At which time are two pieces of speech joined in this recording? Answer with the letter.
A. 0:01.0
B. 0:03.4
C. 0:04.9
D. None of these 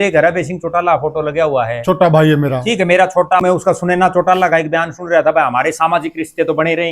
B